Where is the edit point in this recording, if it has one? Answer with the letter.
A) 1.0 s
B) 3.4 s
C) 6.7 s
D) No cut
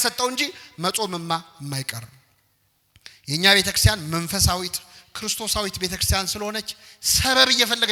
D